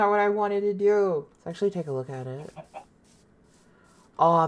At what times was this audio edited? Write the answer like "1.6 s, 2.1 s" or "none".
1.1 s